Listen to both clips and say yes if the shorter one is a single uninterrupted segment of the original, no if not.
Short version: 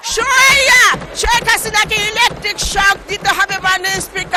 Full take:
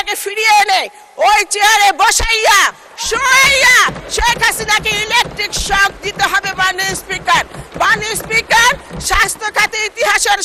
yes